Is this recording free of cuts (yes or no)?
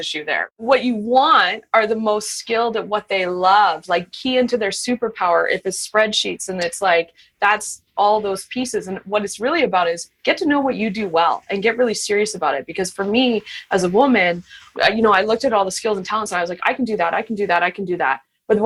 yes